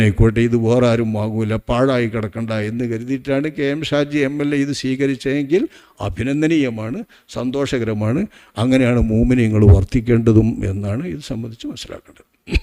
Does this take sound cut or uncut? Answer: uncut